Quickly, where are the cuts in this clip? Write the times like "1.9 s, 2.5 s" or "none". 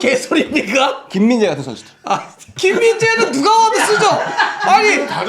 2.4 s

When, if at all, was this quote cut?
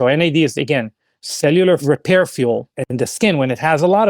1.8 s, 2.8 s

